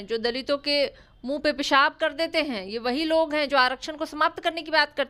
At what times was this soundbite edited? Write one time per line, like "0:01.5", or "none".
none